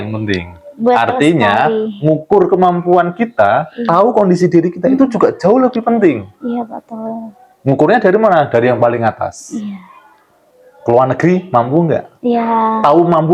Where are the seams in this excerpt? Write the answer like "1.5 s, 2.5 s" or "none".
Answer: none